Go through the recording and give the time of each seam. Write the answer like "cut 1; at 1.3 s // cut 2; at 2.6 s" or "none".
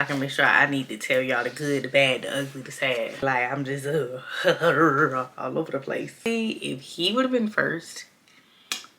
cut 1; at 3.2 s // cut 2; at 6.3 s